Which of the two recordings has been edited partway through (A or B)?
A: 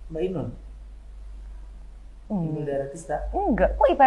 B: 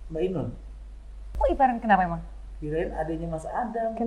B